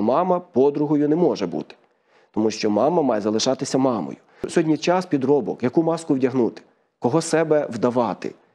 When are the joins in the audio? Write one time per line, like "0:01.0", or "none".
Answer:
0:04.5